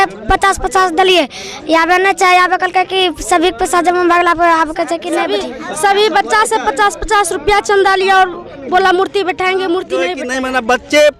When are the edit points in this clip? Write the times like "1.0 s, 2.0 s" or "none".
5.3 s, 10.2 s